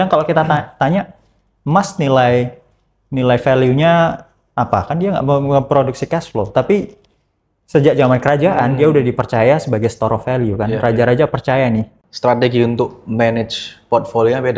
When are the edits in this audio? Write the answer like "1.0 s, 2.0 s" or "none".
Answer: 12.0 s